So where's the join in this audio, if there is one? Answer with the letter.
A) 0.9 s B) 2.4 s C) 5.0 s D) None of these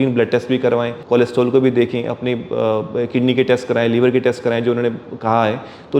A